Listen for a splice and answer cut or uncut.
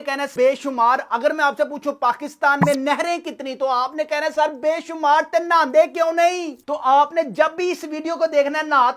uncut